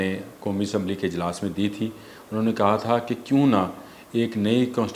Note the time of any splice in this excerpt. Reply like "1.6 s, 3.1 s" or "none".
none